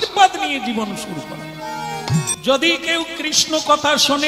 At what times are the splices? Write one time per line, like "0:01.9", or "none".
0:02.3